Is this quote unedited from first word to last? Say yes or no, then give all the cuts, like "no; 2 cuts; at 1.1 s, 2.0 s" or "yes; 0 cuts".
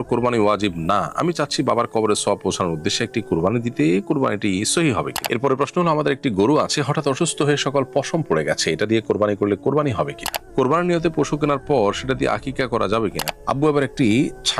no; 3 cuts; at 5.2 s, 10.4 s, 13.3 s